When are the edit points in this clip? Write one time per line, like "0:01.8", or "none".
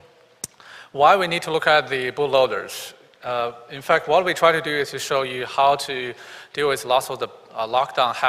0:03.7